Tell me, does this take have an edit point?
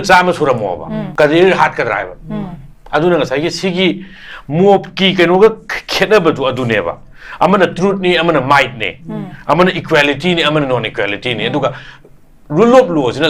yes; 1 cut; at 1.0 s

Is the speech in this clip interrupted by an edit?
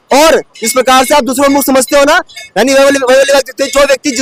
no; 0 cuts

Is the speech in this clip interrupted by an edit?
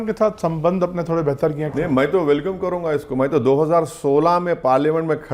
yes; 1 cut; at 1.6 s

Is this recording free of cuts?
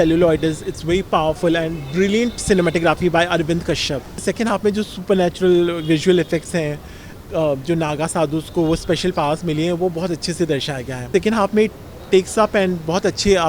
no; 2 cuts; at 4.1 s, 11.1 s

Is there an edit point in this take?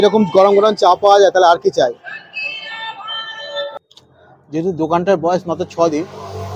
yes; 1 cut; at 3.8 s

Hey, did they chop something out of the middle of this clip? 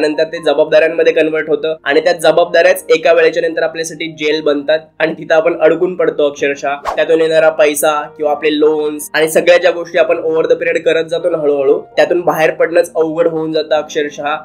no; 0 cuts

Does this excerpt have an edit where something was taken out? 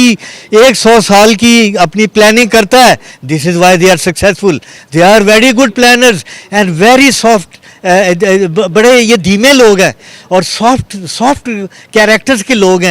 yes; 1 cut; at 3.1 s

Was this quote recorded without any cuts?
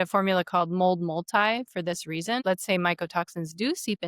no; 1 cut; at 2.4 s

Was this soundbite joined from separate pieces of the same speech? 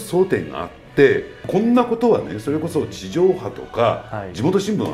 yes; 1 cut; at 1.3 s

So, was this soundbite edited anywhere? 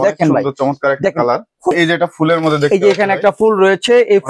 yes; 1 cut; at 1.7 s

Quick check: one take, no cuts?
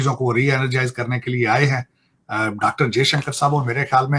yes; 0 cuts

